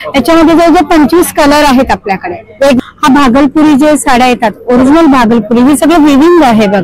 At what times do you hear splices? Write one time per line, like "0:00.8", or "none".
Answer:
0:02.8